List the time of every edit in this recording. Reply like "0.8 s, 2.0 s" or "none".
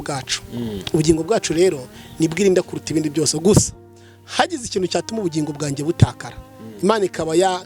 none

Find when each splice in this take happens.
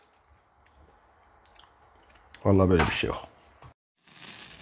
3.7 s

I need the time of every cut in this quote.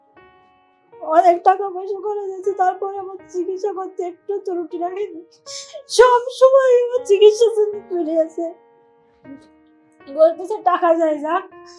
1.0 s

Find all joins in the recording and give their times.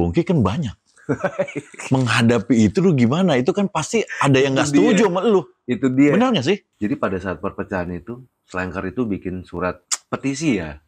6.7 s, 9.9 s

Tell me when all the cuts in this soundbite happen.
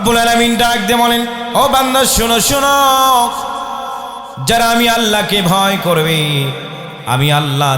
1.4 s

